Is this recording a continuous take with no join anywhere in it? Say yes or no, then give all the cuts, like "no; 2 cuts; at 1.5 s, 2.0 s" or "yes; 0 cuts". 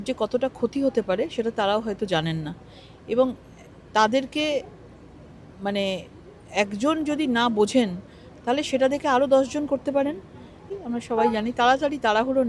no; 1 cut; at 10.7 s